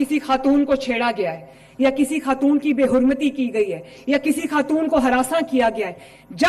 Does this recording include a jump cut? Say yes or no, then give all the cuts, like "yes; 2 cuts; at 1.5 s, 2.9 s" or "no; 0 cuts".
no; 0 cuts